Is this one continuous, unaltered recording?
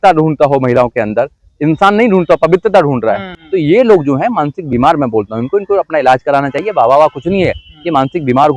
no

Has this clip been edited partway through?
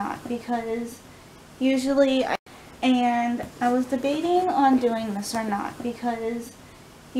yes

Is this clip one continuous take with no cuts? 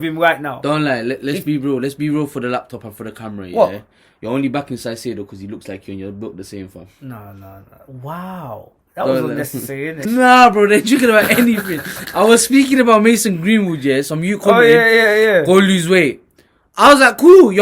no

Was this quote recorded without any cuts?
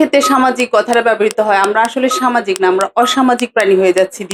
yes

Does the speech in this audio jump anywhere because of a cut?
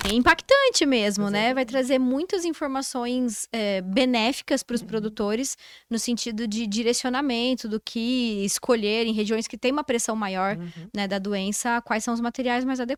no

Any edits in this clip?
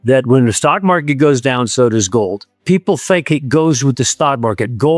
yes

